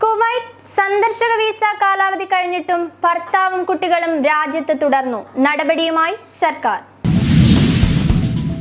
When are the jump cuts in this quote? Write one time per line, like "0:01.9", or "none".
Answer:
0:06.9